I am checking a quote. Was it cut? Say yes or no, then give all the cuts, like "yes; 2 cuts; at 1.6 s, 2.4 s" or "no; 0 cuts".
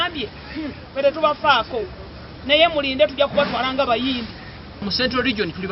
yes; 1 cut; at 4.8 s